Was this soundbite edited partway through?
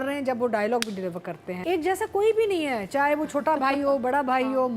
yes; 1 cut; at 1.5 s

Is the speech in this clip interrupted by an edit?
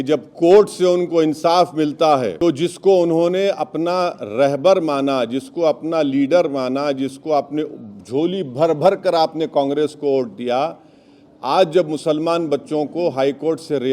yes; 1 cut; at 2.3 s

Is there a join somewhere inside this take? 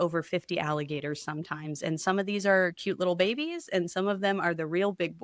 no; 0 cuts

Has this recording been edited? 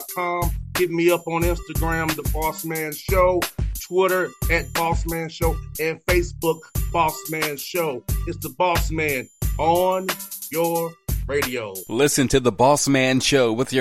no; 0 cuts

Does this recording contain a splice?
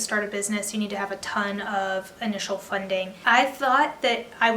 yes; 1 cut; at 3.2 s

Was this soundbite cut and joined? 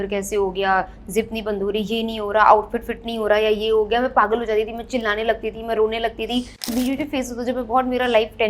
yes; 1 cut; at 6.7 s

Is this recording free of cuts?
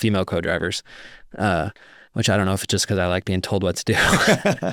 yes; 0 cuts

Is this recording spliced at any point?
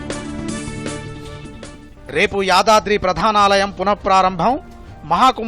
yes; 1 cut; at 1.9 s

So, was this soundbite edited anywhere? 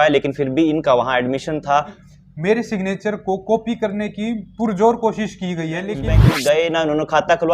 yes; 2 cuts; at 2.0 s, 6.1 s

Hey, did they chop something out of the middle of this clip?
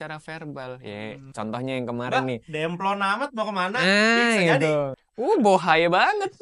yes; 1 cut; at 5.0 s

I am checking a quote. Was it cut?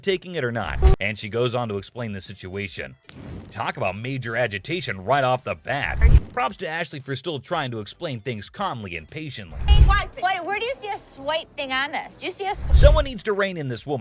yes; 2 cuts; at 1.0 s, 5.9 s

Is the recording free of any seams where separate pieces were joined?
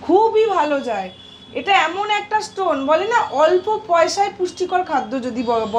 yes; 0 cuts

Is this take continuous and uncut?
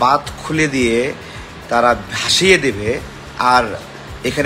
no; 1 cut; at 3.2 s

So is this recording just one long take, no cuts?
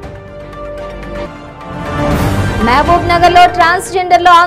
yes; 0 cuts

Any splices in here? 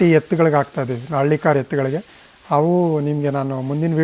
no; 0 cuts

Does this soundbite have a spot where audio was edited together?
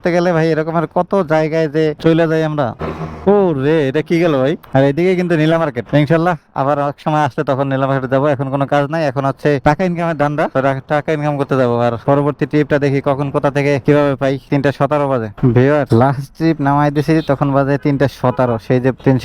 no; 0 cuts

